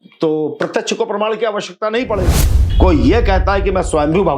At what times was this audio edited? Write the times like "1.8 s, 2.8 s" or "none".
2.6 s